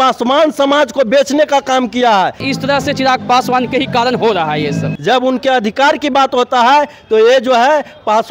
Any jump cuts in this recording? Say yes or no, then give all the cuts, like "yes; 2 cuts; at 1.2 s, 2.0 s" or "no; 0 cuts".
yes; 2 cuts; at 2.5 s, 4.9 s